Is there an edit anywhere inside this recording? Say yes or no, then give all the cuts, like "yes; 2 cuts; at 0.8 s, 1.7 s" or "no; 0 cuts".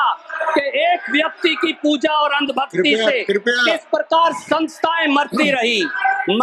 no; 0 cuts